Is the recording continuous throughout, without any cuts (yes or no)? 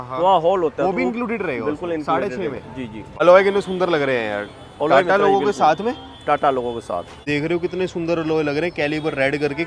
no